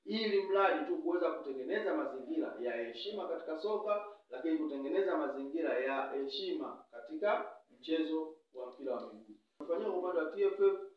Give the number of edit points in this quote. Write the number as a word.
one